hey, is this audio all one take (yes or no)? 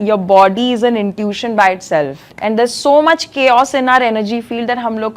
no